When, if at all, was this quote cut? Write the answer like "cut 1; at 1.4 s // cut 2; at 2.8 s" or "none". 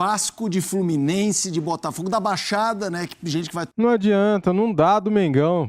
none